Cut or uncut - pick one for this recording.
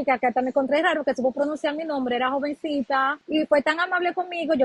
cut